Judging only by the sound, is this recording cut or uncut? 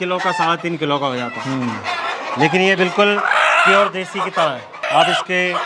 uncut